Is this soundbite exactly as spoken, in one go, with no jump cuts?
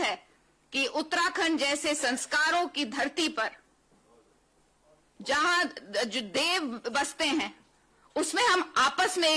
yes; 0 cuts

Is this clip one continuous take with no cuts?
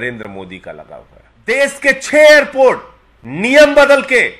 no; 1 cut; at 1.5 s

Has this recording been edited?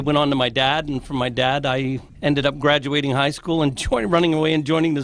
yes; 1 cut; at 2.1 s

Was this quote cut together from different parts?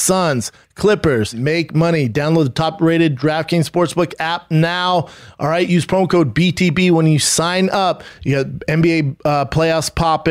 yes; 2 cuts; at 1.3 s, 8.1 s

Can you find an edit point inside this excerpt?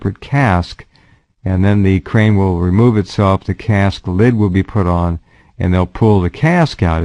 yes; 1 cut; at 4.3 s

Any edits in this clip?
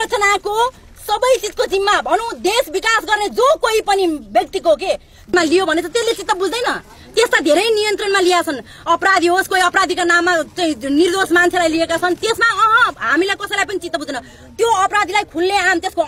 yes; 1 cut; at 5.3 s

